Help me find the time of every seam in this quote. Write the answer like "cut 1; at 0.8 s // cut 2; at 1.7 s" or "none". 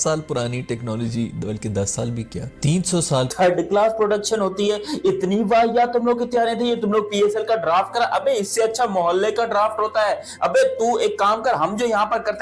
cut 1; at 3.3 s